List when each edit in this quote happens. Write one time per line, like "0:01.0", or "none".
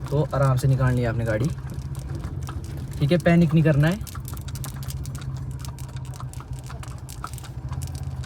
none